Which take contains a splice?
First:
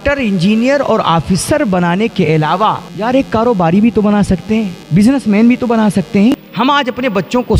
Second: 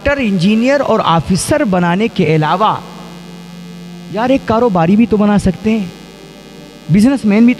first; 3 cuts; at 2.9 s, 4.8 s, 6.3 s

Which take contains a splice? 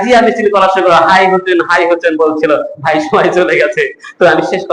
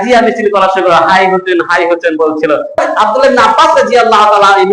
second; 1 cut; at 2.8 s

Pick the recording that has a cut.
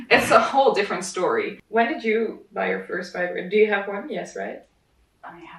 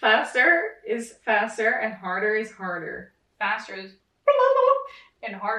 first; 1 cut; at 1.6 s

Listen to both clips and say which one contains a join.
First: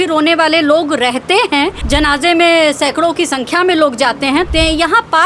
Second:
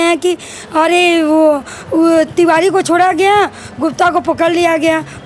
first; 2 cuts; at 1.8 s, 4.5 s

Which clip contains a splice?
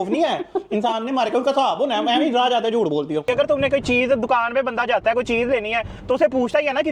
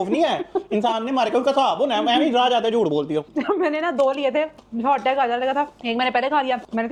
first; 1 cut; at 3.3 s

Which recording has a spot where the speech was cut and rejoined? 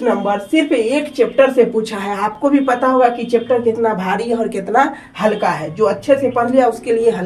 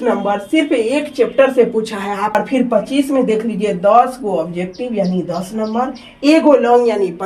second; 1 cut; at 2.3 s

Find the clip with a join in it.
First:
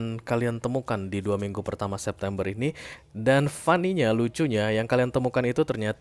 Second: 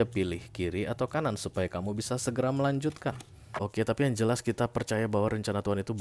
second; 1 cut; at 3.5 s

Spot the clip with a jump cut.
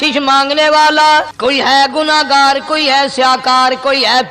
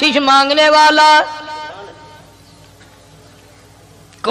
first; 1 cut; at 1.3 s

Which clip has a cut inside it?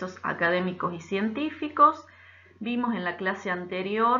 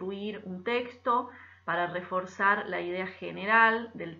second; 1 cut; at 3.2 s

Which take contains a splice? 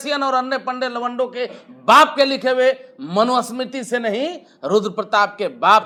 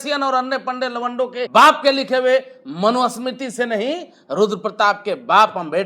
second; 1 cut; at 1.5 s

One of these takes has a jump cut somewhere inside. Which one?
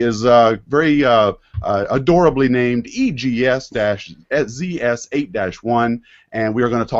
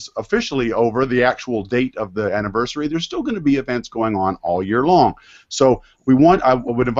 first; 1 cut; at 4.6 s

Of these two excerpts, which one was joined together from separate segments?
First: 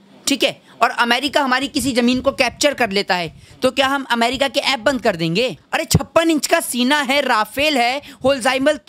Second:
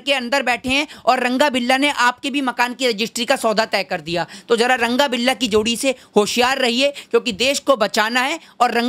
first; 1 cut; at 5.7 s

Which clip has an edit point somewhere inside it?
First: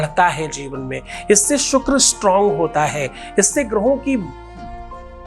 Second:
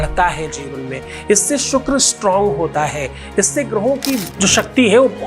second; 1 cut; at 4.3 s

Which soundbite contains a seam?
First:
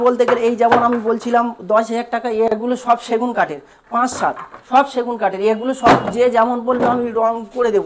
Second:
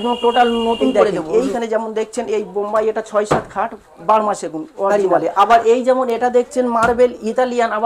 second; 2 cuts; at 1.1 s, 4.9 s

